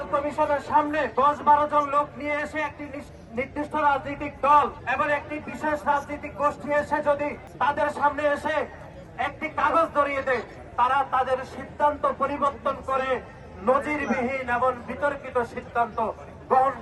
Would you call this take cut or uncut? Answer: cut